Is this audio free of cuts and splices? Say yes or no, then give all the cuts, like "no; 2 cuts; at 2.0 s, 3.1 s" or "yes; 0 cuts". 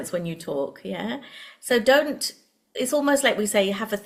yes; 0 cuts